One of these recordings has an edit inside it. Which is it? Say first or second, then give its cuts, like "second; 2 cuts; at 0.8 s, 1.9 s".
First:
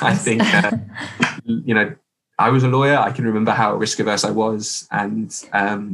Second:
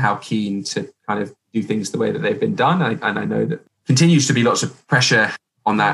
second; 1 cut; at 3.7 s